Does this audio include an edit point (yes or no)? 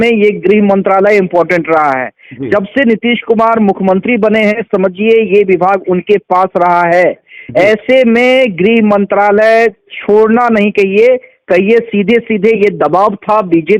no